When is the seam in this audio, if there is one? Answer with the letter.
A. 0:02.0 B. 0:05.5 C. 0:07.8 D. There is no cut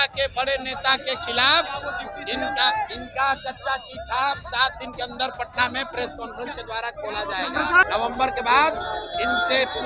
C